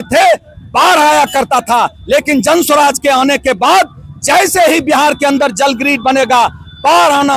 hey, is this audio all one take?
yes; 0 cuts

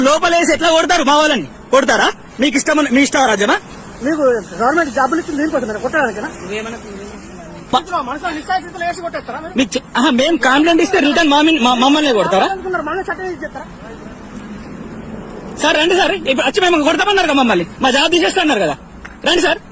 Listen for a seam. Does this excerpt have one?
yes; 1 cut; at 7.7 s

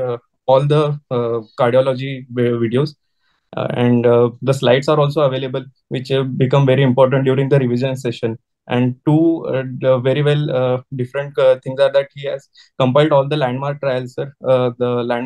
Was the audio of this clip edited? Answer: no; 0 cuts

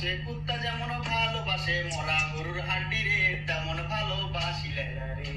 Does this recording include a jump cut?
no; 0 cuts

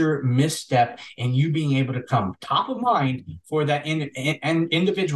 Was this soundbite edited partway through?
no; 0 cuts

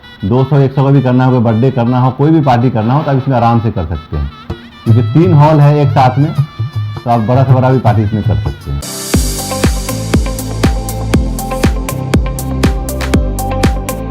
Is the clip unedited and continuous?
no; 1 cut; at 8.8 s

